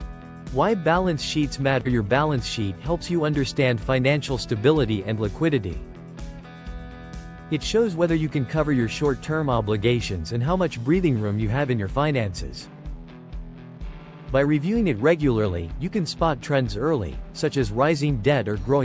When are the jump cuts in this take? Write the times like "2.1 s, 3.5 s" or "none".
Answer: 5.8 s, 7.2 s, 12.6 s, 14.3 s